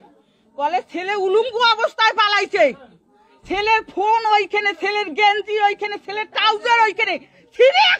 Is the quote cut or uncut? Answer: uncut